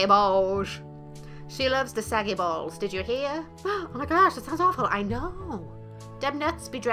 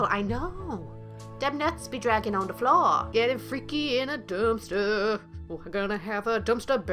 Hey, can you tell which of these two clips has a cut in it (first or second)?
second